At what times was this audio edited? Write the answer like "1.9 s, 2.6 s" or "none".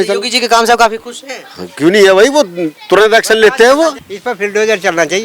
4.1 s